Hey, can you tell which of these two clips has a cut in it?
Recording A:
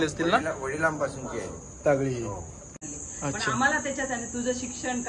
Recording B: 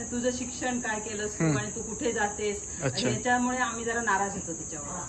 A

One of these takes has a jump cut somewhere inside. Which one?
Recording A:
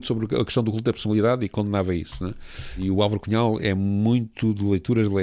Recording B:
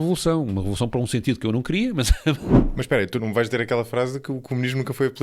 B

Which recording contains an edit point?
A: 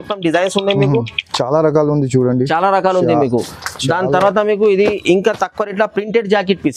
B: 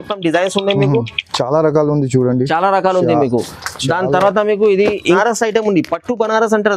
B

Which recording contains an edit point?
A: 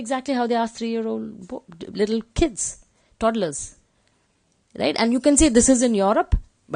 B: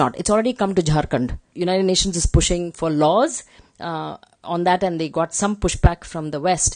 B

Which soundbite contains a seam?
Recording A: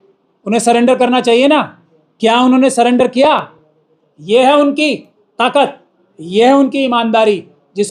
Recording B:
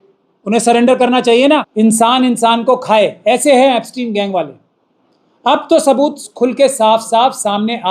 B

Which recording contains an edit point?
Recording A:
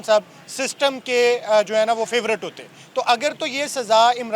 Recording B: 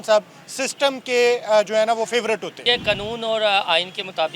B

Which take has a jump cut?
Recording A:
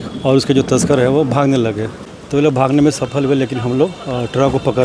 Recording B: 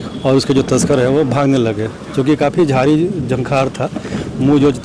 A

